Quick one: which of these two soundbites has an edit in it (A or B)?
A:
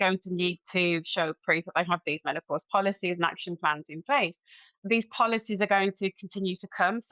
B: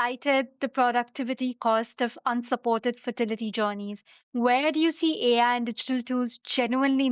A